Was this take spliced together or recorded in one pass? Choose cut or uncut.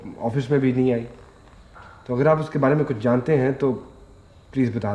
uncut